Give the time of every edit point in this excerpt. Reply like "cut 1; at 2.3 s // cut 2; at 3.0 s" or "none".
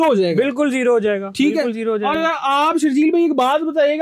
none